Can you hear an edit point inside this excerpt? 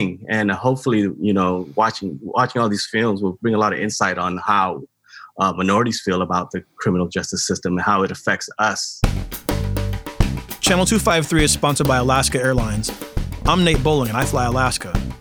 yes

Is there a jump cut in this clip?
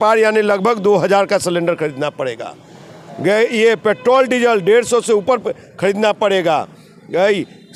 no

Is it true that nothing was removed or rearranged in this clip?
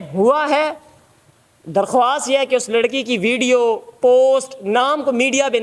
yes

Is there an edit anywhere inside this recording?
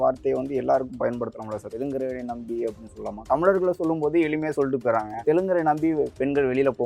yes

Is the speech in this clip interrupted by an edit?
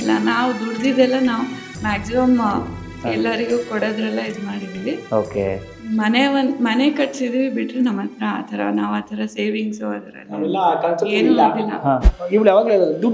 yes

